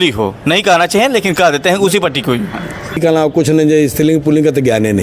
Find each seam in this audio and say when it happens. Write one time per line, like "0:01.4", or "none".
0:03.0

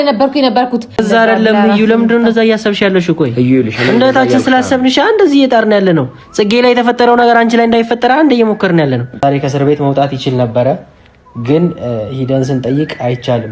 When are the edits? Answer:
0:01.0
0:09.2

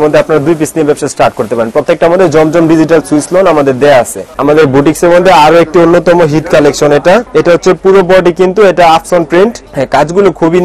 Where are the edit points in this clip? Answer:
0:04.3
0:07.3
0:09.7

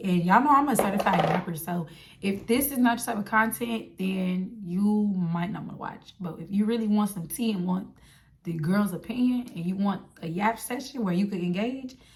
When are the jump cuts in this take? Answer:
none

